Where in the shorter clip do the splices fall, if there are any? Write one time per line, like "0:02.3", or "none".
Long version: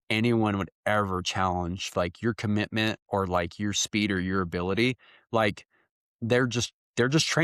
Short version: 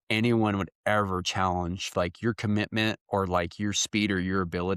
none